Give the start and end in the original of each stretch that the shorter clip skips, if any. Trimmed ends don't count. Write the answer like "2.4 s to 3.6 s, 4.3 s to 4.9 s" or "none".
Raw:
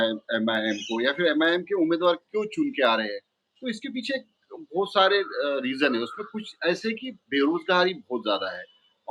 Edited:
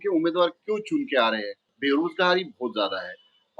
3.3 s to 7.1 s